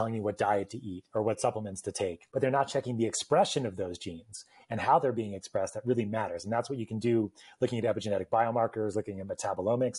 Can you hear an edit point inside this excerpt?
yes; 1 cut; at 2.2 s

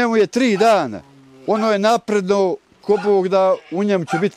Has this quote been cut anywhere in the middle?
no; 0 cuts

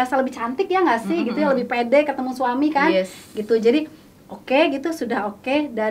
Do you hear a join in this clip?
no; 0 cuts

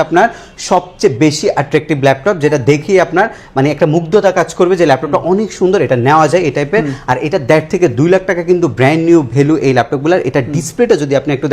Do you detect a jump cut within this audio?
no; 0 cuts

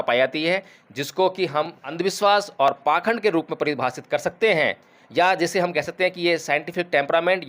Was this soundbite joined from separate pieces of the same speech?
yes; 1 cut; at 1.9 s

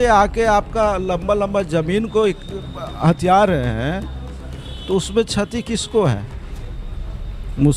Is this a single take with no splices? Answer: yes; 0 cuts

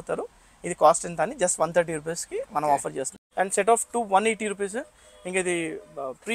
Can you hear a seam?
yes; 1 cut; at 3.2 s

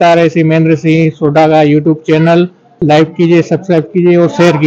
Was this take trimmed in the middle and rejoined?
yes; 2 cuts; at 1.6 s, 2.8 s

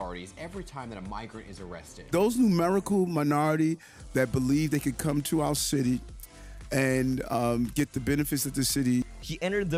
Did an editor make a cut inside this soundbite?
no; 0 cuts

